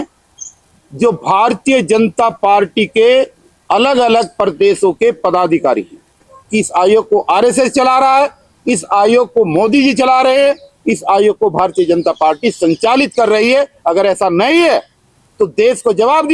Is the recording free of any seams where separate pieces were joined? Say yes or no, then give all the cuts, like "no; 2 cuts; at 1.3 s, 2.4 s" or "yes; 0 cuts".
no; 1 cut; at 6.4 s